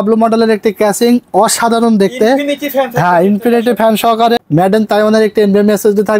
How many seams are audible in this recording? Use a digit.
1